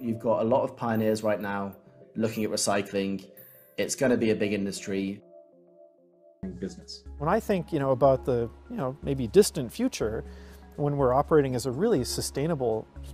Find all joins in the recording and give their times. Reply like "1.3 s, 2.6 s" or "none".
6.5 s